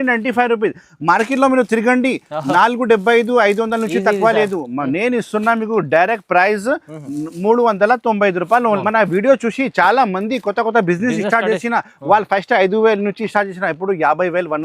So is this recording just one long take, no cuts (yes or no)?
no